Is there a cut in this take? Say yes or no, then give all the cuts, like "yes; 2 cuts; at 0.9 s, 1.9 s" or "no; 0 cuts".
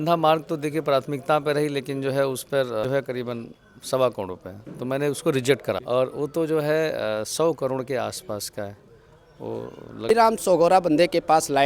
yes; 3 cuts; at 2.6 s, 5.8 s, 10.1 s